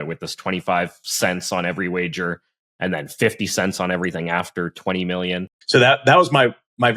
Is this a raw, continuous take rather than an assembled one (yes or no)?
no